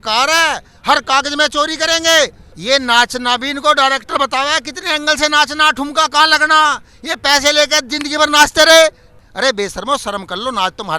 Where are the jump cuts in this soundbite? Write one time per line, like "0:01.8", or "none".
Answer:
0:02.5
0:09.2